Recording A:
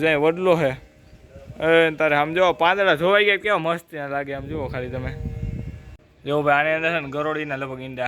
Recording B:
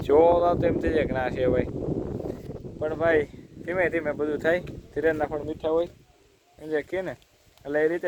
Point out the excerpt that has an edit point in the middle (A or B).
A